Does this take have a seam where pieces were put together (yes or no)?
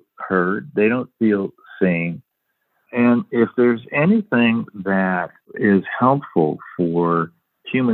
yes